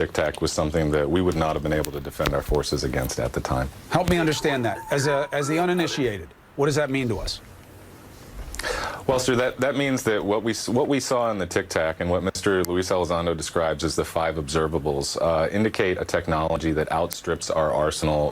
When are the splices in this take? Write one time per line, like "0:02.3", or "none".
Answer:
0:04.8
0:14.6